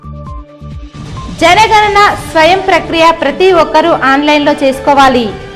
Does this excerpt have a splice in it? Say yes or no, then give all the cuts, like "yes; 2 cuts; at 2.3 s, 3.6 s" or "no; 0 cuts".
yes; 1 cut; at 1.2 s